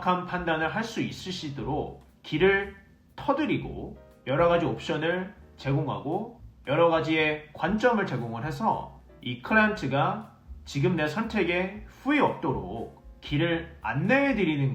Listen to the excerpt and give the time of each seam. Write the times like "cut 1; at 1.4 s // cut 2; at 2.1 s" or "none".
none

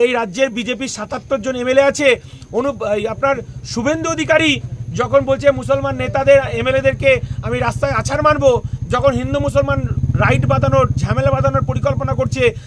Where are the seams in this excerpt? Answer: none

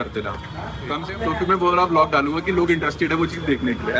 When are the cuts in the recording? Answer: cut 1; at 1.0 s

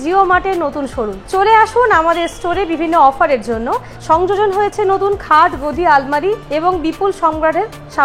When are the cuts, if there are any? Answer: cut 1; at 3.9 s // cut 2; at 6.4 s

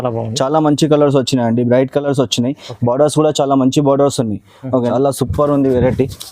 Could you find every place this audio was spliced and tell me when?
cut 1; at 4.8 s

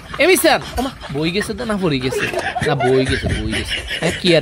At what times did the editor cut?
none

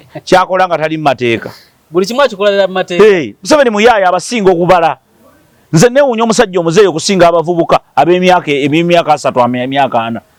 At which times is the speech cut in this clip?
none

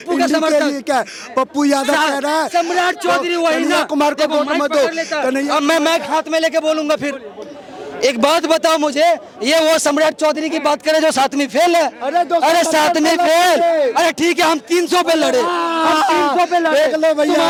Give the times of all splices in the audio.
none

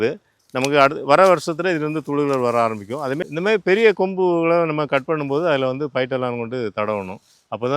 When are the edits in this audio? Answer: cut 1; at 3.2 s

